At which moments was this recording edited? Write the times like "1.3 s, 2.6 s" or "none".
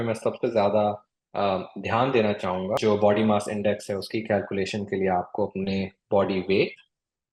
2.8 s